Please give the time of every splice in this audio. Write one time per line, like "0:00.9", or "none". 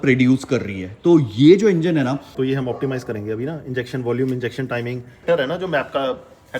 0:02.3
0:05.2